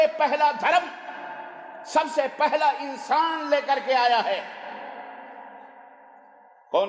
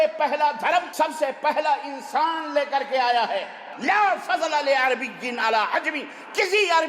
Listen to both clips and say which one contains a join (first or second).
second